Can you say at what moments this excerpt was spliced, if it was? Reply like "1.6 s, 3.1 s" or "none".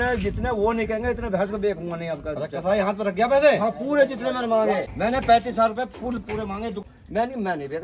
4.9 s, 6.8 s